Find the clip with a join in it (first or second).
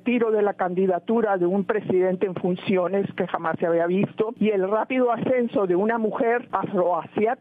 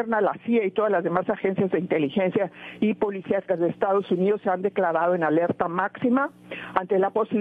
first